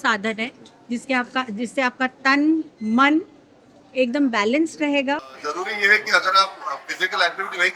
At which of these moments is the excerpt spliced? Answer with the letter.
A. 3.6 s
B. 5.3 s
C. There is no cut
B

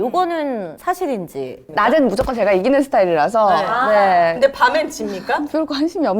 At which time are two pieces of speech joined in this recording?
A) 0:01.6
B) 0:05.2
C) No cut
A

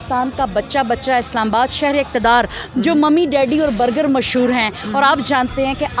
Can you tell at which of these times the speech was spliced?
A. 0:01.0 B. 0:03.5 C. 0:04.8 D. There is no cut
D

